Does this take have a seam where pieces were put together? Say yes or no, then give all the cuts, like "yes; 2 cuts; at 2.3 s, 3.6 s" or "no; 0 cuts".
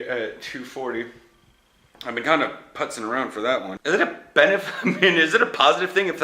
yes; 1 cut; at 3.7 s